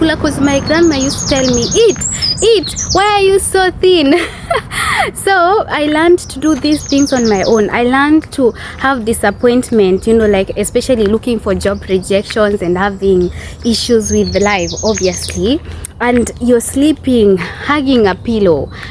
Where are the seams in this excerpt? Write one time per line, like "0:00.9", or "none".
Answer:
none